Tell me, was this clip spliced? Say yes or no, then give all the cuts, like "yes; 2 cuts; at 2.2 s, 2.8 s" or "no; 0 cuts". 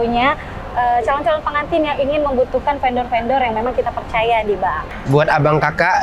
yes; 1 cut; at 4.9 s